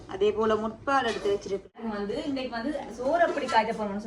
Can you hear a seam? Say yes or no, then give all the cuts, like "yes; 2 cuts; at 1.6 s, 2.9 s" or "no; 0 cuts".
yes; 1 cut; at 1.8 s